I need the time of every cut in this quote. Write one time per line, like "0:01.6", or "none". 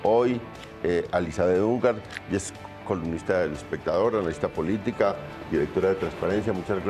0:05.0

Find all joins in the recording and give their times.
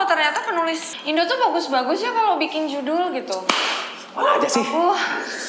0:00.9

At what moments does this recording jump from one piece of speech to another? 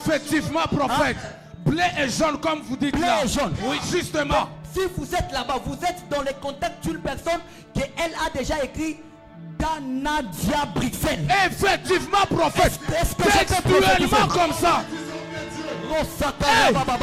none

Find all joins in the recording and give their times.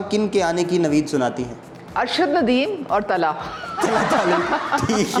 none

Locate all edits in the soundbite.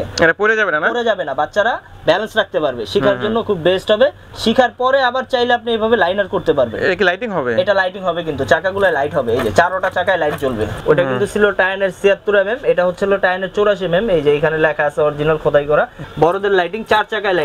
0:10.7
0:16.1

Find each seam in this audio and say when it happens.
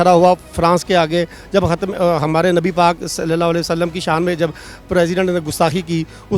none

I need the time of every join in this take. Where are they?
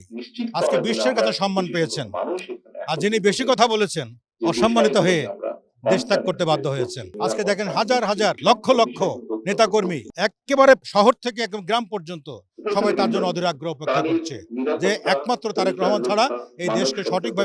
0:07.0
0:08.4
0:10.0
0:10.9

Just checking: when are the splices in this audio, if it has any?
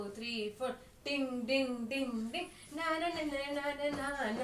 none

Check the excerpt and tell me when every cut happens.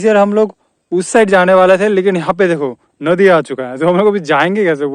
none

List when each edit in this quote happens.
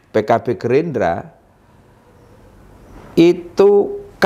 none

